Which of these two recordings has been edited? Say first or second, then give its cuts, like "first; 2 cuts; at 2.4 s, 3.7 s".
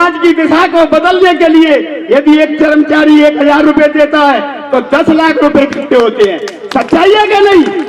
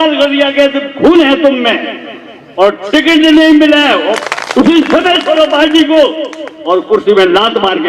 second; 1 cut; at 4.2 s